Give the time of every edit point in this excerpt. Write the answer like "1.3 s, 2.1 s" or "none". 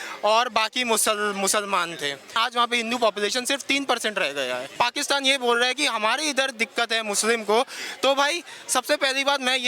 2.3 s, 4.7 s